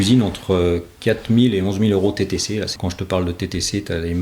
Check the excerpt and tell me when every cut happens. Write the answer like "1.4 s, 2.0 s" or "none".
2.7 s